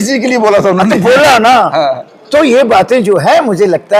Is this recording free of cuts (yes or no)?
yes